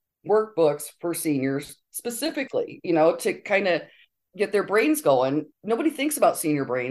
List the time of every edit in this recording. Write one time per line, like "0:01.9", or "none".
0:01.8
0:05.5

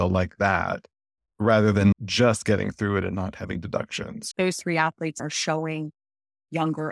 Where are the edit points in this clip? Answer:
0:01.9
0:04.2
0:05.2

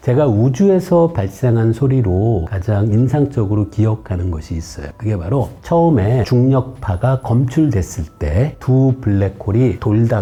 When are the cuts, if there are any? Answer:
none

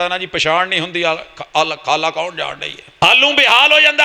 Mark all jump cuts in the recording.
0:03.0

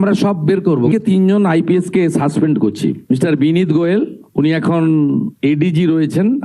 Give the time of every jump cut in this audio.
0:00.9

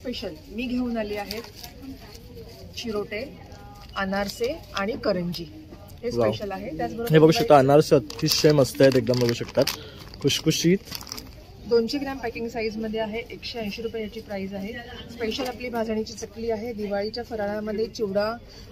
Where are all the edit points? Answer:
none

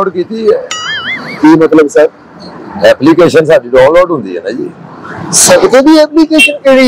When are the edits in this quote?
none

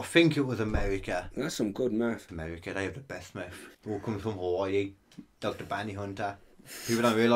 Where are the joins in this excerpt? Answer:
0:02.3
0:03.7

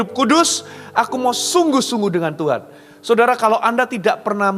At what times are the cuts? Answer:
none

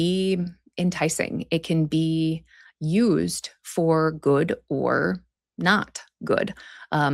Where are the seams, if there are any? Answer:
none

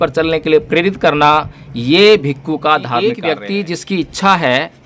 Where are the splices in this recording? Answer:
0:03.1

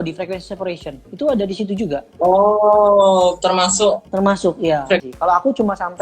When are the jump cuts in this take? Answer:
0:05.1

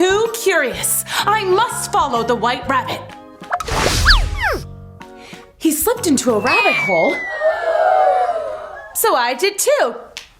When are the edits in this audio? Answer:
none

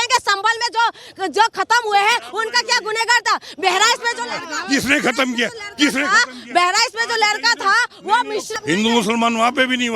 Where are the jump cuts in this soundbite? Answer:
0:08.5

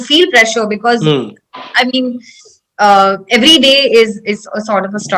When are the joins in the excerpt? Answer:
none

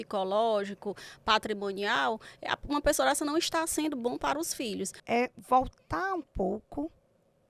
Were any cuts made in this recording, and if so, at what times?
0:04.9

